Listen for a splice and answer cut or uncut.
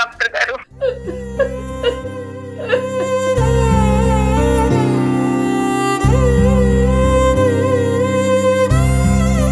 uncut